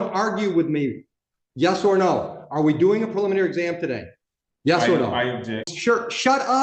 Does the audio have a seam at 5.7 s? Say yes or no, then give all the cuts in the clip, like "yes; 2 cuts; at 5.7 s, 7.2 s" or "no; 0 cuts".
yes; 1 cut; at 5.7 s